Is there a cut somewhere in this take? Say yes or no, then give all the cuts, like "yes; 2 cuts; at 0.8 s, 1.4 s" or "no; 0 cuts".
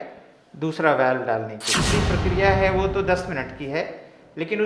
yes; 1 cut; at 1.8 s